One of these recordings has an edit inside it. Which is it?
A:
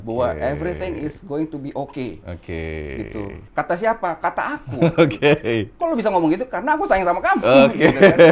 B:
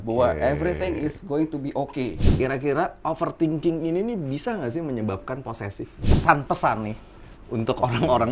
B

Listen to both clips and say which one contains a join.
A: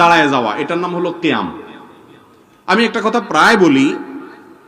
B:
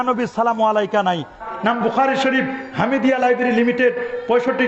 B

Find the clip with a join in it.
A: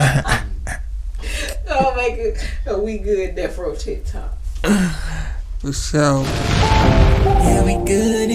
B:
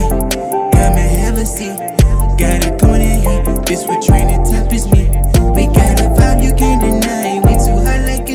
A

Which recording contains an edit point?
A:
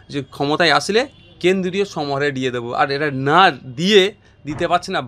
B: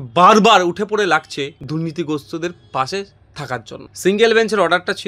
B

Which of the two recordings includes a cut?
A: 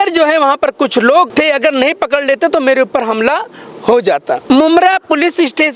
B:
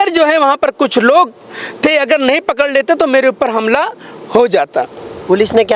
A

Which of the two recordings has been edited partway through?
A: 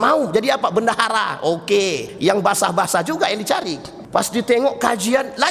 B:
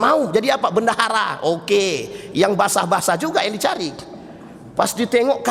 A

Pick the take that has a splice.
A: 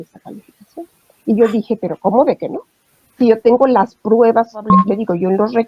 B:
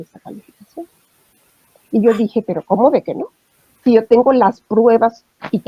A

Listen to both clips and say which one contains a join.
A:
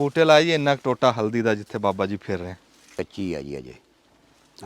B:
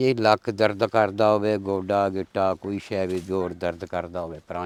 A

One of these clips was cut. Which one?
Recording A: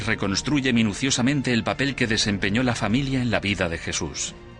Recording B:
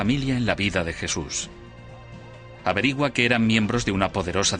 A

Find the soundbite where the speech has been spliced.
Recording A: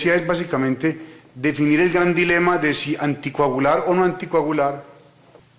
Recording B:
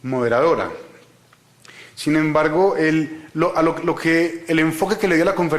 B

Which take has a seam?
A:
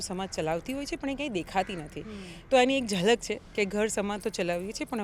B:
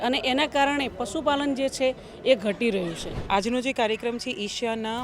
B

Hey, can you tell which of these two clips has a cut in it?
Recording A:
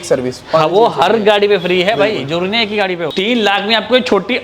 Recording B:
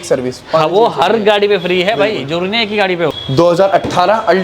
A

